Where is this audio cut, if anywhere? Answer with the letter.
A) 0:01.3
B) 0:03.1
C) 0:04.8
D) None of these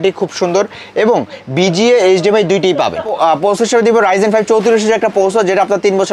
B